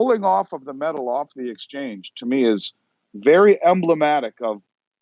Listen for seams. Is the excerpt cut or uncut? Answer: uncut